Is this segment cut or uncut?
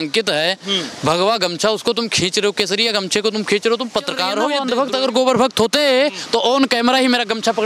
cut